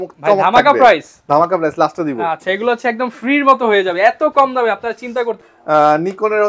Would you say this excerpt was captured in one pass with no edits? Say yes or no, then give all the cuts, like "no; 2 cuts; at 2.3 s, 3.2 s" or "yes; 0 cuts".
yes; 0 cuts